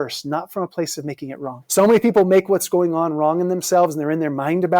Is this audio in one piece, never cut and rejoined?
no; 1 cut; at 1.5 s

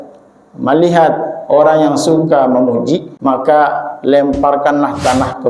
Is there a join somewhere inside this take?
yes; 1 cut; at 3.1 s

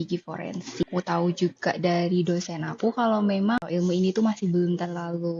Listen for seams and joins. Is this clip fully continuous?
no; 2 cuts; at 0.9 s, 3.6 s

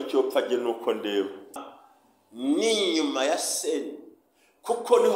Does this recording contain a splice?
yes; 1 cut; at 1.7 s

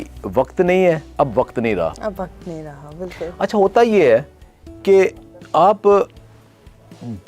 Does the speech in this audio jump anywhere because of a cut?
no; 0 cuts

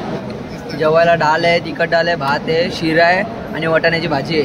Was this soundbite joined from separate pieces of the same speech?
no; 0 cuts

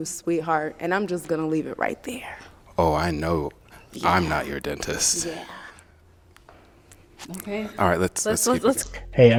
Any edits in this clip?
no; 0 cuts

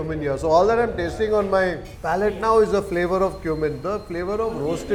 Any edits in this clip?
no; 0 cuts

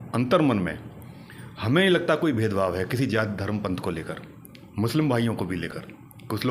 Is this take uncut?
yes; 0 cuts

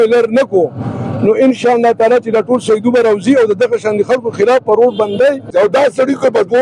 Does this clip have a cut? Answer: yes; 1 cut; at 5.5 s

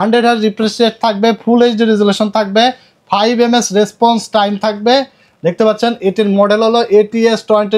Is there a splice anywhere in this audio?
no; 0 cuts

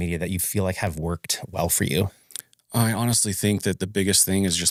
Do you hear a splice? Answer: no; 0 cuts

